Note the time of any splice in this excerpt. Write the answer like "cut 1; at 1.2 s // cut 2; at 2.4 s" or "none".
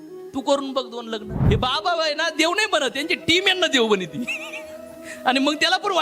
cut 1; at 1.3 s